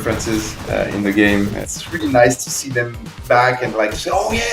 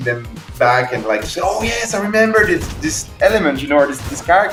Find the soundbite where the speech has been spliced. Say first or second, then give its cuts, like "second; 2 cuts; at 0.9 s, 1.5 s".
first; 1 cut; at 1.6 s